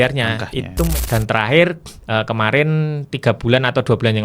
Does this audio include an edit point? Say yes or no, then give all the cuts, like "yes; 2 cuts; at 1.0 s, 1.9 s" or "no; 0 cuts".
yes; 1 cut; at 0.9 s